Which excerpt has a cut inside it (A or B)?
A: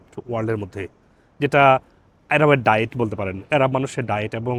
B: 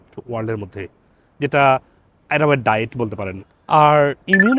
B